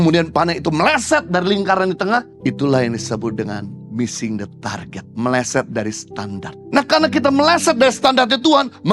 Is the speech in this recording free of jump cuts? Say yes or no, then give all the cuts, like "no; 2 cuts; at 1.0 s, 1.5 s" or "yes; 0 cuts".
no; 3 cuts; at 2.3 s, 5.0 s, 6.5 s